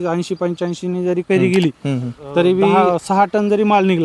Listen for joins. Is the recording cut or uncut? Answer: cut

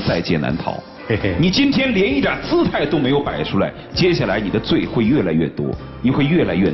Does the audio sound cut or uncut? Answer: uncut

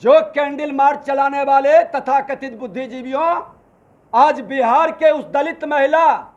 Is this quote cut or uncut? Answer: uncut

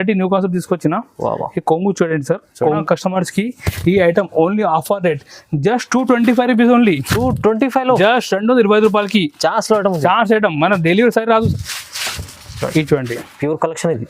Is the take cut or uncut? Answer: cut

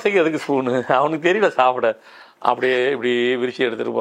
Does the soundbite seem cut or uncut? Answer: uncut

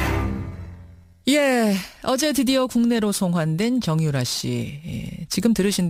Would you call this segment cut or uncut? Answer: uncut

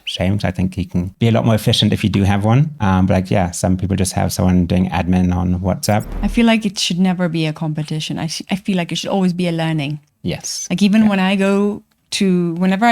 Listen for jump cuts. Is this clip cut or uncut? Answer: cut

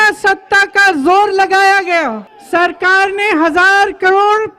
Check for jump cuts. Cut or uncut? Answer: cut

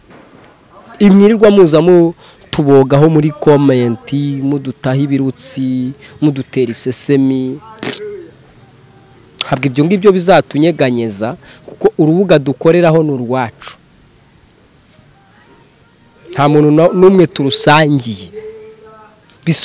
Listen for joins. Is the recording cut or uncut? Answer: uncut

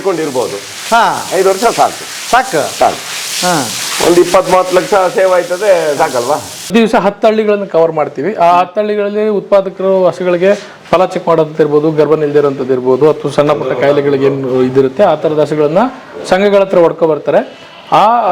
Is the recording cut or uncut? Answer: cut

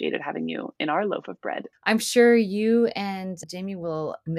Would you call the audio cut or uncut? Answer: cut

